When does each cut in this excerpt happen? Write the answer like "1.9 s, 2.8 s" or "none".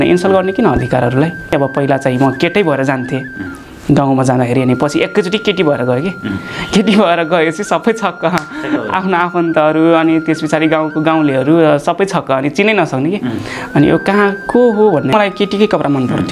1.5 s, 15.1 s

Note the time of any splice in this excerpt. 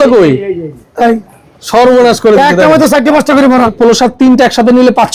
3.7 s

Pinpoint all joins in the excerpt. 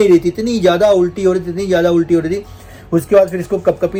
none

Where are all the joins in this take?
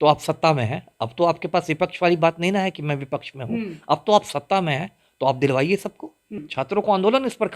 6.4 s

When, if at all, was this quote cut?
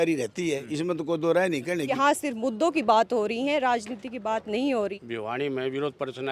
1.9 s, 5.0 s

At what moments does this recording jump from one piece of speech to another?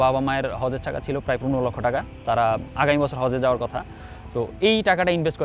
none

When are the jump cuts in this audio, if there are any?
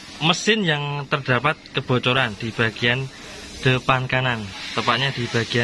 none

